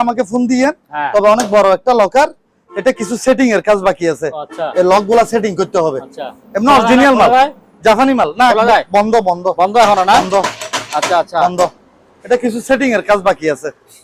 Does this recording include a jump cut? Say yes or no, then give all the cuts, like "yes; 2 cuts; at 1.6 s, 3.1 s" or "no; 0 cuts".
no; 0 cuts